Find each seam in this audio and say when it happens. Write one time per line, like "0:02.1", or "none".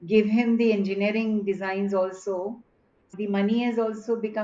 0:03.2

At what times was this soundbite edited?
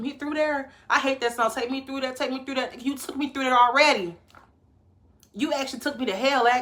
none

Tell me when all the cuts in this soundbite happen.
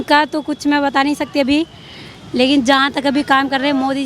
none

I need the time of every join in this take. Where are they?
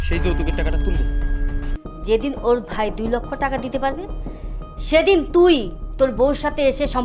0:01.7

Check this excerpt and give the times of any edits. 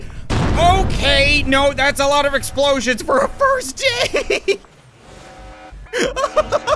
0:05.8

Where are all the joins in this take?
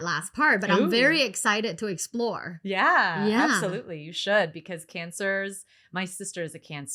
none

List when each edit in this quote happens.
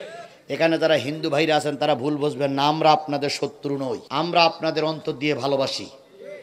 none

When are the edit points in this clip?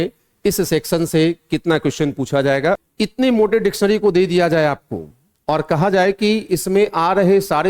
0:02.8

